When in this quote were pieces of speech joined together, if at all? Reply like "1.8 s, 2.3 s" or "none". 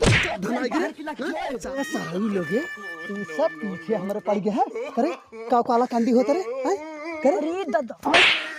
1.7 s